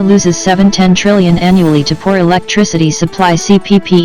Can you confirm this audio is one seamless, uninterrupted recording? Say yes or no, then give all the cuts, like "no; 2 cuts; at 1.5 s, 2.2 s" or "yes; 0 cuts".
yes; 0 cuts